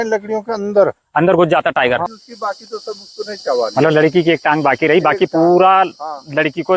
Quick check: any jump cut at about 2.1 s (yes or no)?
yes